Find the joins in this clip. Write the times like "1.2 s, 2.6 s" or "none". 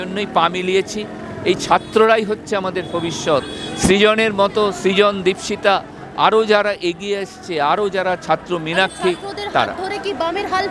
none